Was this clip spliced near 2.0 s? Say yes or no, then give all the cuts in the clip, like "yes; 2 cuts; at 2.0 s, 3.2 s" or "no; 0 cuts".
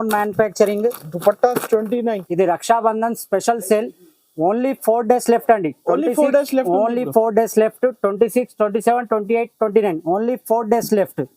yes; 1 cut; at 2.0 s